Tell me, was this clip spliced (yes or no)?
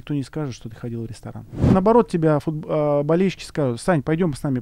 yes